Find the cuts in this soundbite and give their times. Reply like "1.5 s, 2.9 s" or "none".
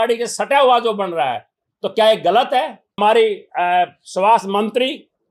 3.0 s